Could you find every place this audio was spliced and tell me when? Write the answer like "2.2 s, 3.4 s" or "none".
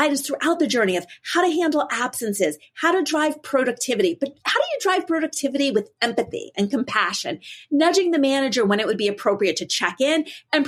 none